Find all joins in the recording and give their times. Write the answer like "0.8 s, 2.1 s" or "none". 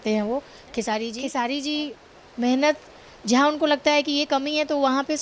1.1 s